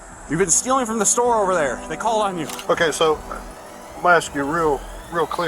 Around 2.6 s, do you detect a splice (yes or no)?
yes